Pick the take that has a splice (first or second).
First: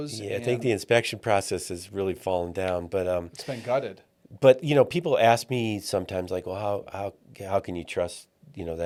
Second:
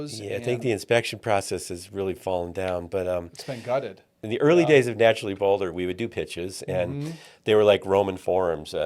second